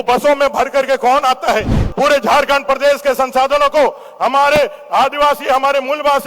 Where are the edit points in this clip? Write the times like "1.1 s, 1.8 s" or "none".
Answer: 1.8 s